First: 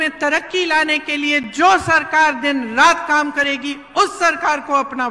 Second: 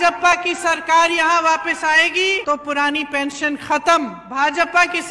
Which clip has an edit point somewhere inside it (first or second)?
second